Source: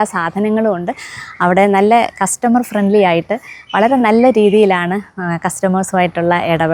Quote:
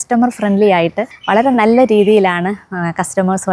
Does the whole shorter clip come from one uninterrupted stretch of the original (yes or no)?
no